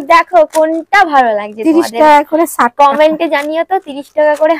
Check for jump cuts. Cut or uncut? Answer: uncut